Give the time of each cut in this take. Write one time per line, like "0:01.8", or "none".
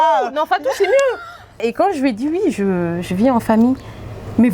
0:01.6